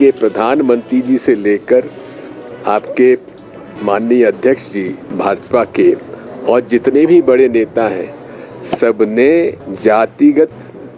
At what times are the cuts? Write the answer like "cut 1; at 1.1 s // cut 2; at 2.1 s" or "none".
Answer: cut 1; at 5.0 s // cut 2; at 9.7 s